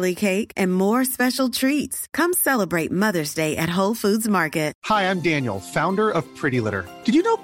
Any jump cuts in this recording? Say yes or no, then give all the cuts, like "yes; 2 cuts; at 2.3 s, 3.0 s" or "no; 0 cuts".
yes; 1 cut; at 4.8 s